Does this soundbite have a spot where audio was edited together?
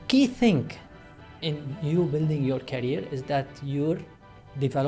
no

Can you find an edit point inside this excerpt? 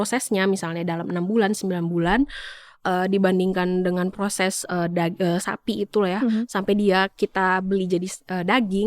no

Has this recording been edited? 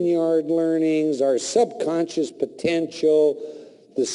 yes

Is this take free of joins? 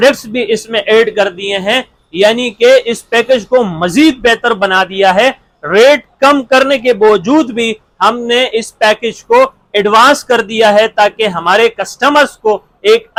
yes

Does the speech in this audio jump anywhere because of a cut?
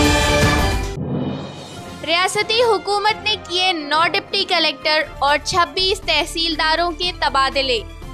no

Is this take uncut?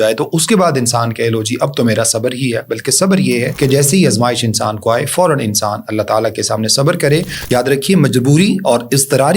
no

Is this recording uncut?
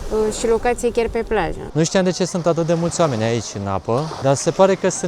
no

